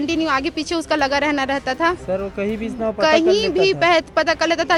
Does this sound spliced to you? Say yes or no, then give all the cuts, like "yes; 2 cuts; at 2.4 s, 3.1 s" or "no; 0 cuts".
no; 0 cuts